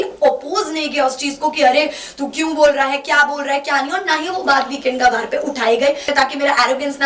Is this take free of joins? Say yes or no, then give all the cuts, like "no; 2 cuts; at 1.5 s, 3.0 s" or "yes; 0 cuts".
no; 1 cut; at 6.1 s